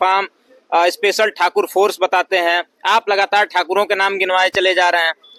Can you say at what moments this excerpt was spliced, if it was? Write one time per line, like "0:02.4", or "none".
none